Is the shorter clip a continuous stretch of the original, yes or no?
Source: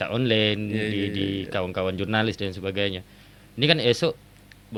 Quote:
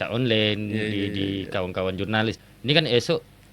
no